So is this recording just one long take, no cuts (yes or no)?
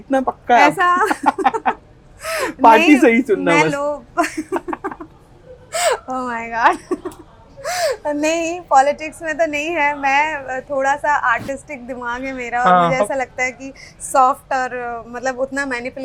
yes